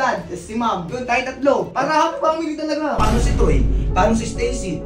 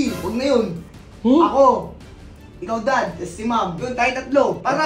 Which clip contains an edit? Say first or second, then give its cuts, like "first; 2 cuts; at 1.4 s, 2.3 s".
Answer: first; 1 cut; at 3.0 s